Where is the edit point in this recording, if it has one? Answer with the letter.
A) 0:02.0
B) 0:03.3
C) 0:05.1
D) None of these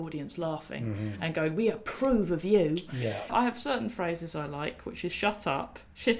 B